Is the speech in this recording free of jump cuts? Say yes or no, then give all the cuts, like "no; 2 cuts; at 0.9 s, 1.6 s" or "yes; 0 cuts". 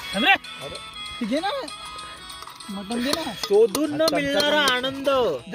yes; 0 cuts